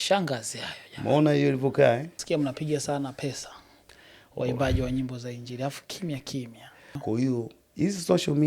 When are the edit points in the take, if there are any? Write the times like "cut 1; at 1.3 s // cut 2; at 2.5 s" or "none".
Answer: cut 1; at 2.1 s // cut 2; at 7.0 s